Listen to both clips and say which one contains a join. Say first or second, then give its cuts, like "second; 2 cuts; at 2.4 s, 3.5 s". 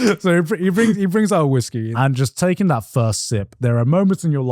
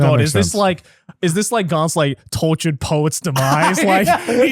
first; 2 cuts; at 1.9 s, 3.5 s